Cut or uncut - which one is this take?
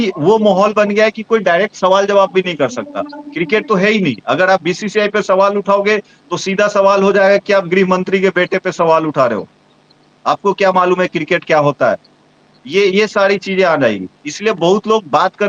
uncut